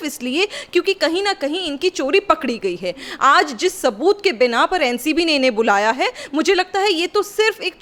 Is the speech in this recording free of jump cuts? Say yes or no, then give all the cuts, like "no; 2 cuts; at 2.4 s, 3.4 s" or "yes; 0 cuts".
yes; 0 cuts